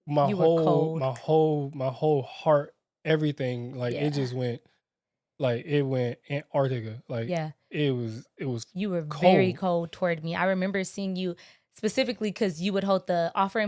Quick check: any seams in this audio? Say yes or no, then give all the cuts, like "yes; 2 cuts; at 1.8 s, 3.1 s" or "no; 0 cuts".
no; 0 cuts